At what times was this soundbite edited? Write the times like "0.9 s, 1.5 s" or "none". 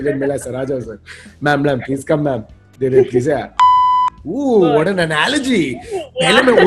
3.8 s

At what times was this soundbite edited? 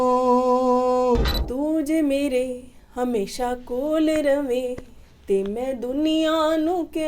1.4 s

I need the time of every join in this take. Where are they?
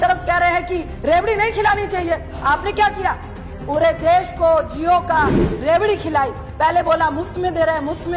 0.9 s

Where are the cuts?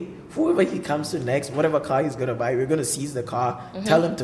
none

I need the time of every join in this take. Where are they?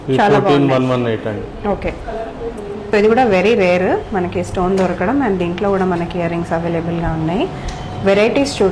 2.9 s

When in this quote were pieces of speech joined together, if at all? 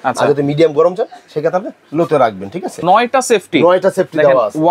2.8 s

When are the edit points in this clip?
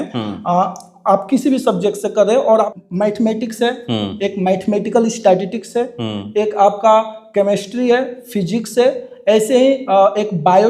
2.7 s

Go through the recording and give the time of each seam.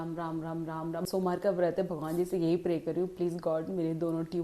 1.0 s

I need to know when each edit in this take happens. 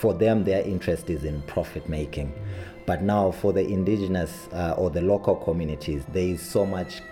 6.0 s

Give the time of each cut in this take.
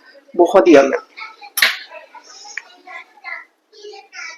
none

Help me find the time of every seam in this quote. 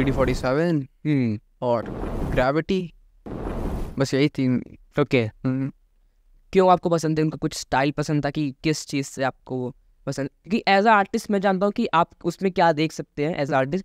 none

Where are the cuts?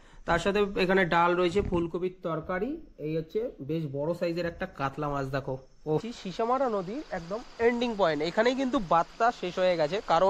6.2 s

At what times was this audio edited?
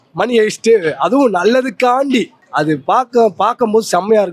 2.4 s

